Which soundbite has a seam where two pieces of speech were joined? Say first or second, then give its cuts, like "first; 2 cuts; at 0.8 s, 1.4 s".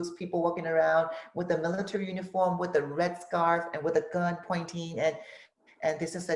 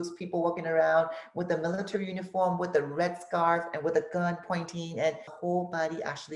second; 1 cut; at 5.4 s